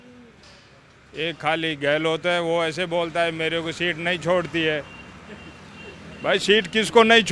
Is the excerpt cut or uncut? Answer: uncut